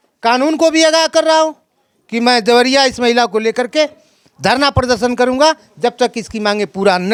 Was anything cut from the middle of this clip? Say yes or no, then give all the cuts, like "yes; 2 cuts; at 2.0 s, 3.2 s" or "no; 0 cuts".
no; 0 cuts